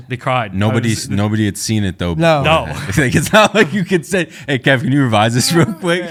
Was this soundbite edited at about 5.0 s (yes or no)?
no